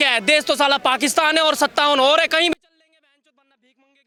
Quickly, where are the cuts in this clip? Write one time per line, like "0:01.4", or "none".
none